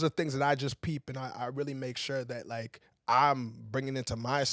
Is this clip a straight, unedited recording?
yes; 0 cuts

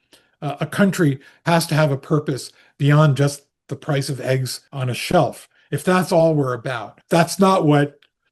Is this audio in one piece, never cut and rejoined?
no; 2 cuts; at 4.6 s, 6.9 s

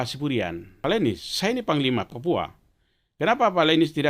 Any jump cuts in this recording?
yes; 2 cuts; at 0.8 s, 2.1 s

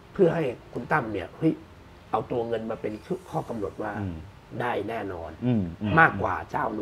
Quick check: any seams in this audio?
no; 0 cuts

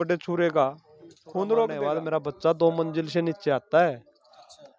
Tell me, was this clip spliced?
yes; 1 cut; at 2.0 s

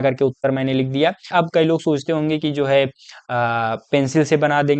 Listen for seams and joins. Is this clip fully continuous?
no; 1 cut; at 1.2 s

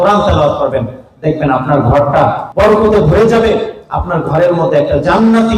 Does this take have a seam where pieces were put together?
yes; 1 cut; at 2.4 s

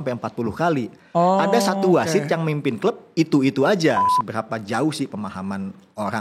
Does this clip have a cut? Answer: yes; 1 cut; at 4.2 s

